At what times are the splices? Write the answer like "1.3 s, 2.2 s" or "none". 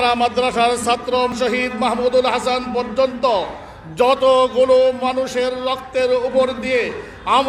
1.3 s